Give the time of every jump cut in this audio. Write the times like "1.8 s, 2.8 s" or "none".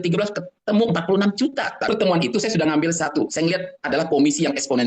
1.9 s